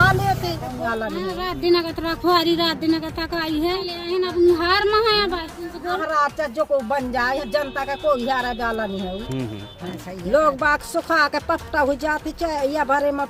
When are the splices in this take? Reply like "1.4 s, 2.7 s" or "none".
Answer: none